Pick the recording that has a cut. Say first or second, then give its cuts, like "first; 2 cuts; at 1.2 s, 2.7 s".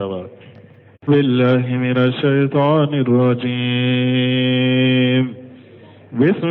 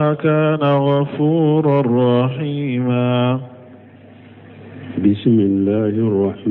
first; 1 cut; at 1.1 s